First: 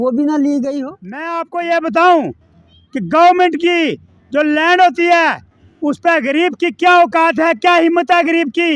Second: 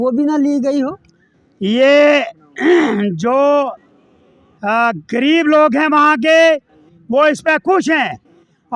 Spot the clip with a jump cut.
first; 1 cut; at 1.4 s

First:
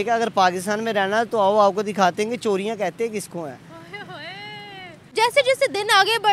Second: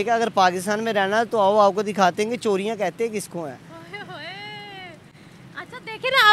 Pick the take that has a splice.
first; 1 cut; at 5.1 s

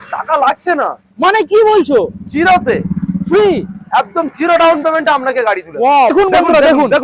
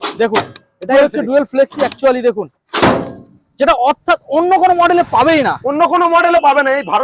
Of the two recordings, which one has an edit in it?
first; 1 cut; at 6.1 s

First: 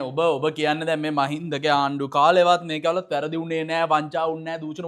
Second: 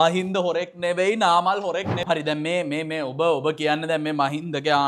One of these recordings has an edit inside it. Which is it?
second; 1 cut; at 1.9 s

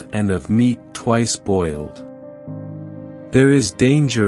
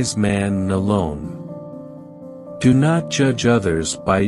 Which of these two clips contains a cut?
first; 2 cuts; at 2.0 s, 3.3 s

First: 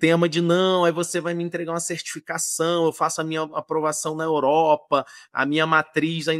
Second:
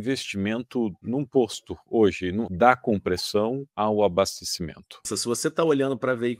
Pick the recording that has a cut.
second; 4 cuts; at 1.0 s, 2.5 s, 3.7 s, 5.1 s

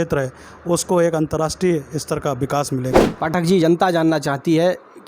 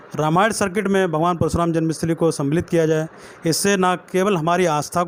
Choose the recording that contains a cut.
first; 1 cut; at 3.1 s

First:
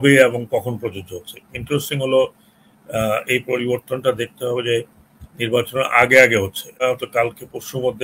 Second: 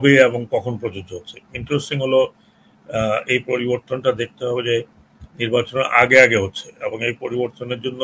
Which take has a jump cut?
first; 1 cut; at 6.8 s

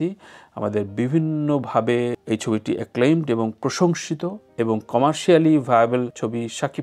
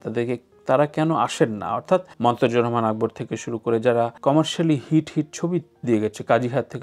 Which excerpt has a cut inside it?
second; 2 cuts; at 2.1 s, 4.1 s

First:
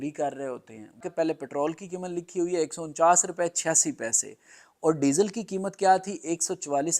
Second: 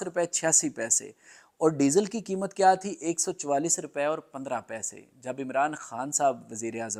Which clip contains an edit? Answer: first; 1 cut; at 1.0 s

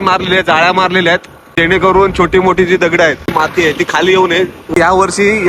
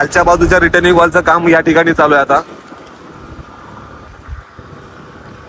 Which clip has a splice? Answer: first; 3 cuts; at 1.5 s, 3.3 s, 4.8 s

